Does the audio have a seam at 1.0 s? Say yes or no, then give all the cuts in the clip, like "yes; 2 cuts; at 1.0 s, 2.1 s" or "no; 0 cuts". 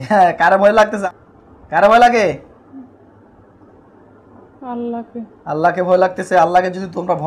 yes; 1 cut; at 1.0 s